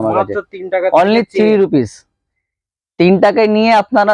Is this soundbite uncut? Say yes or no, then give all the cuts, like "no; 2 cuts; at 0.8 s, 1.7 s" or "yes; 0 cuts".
yes; 0 cuts